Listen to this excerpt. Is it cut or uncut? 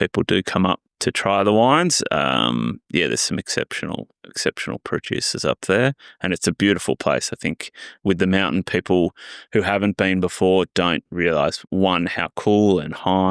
uncut